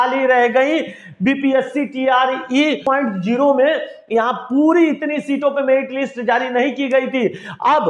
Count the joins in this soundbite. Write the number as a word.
one